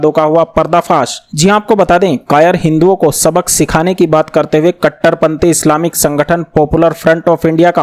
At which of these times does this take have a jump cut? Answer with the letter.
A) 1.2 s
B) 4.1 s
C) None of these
C